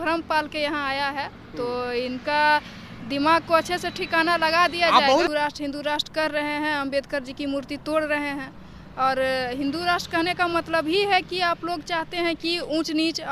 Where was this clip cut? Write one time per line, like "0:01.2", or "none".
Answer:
0:05.3

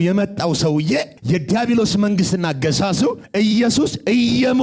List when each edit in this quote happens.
0:01.1
0:03.2

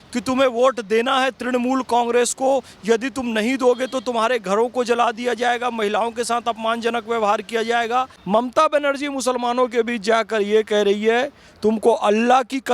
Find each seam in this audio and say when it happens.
0:08.2

